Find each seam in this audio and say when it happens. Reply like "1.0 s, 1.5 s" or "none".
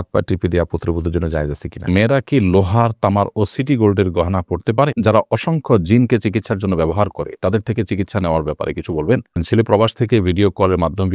1.9 s, 5.0 s, 9.4 s